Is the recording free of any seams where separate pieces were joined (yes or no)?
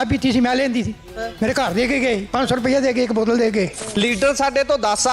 no